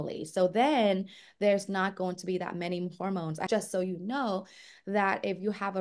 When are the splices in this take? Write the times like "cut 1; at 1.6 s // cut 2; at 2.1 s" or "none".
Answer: cut 1; at 3.4 s